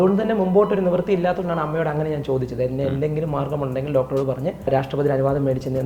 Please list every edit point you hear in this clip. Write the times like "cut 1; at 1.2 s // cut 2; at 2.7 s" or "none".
cut 1; at 4.7 s